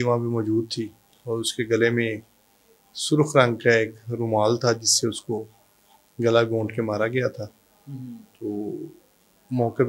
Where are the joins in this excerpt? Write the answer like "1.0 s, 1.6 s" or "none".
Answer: none